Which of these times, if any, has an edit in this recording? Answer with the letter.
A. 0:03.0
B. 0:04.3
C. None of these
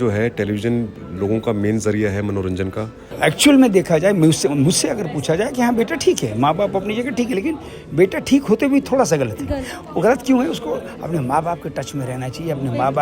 A